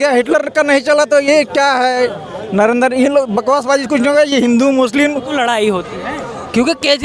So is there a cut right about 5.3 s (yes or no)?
yes